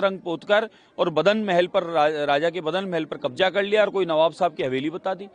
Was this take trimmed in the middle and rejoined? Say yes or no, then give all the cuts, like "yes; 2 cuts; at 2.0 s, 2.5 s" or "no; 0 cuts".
no; 0 cuts